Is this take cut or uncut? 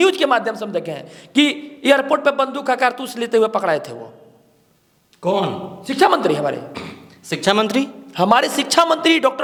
uncut